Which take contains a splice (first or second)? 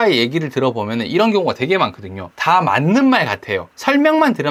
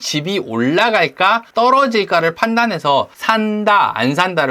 second